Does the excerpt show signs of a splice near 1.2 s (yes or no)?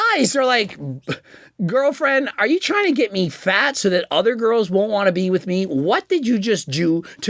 no